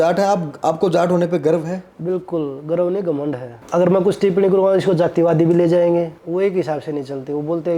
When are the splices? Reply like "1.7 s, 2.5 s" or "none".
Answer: 3.5 s, 6.2 s